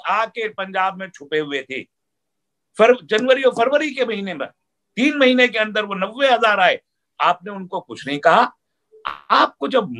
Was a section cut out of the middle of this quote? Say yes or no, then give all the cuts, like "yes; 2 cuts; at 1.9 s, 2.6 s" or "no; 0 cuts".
no; 0 cuts